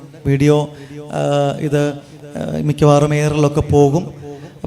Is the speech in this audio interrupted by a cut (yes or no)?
no